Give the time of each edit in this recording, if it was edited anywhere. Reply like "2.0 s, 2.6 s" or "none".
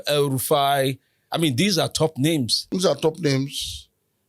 2.6 s